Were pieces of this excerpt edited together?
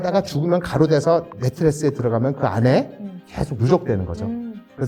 no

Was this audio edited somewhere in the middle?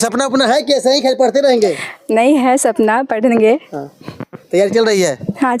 no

